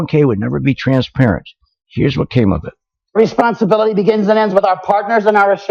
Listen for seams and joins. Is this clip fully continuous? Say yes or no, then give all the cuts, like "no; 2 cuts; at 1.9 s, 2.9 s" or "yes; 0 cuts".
yes; 0 cuts